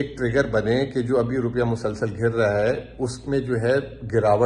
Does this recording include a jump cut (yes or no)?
no